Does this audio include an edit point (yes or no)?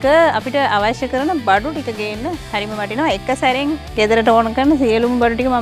no